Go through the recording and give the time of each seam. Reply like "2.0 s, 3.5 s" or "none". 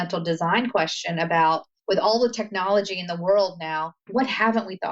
1.7 s, 4.0 s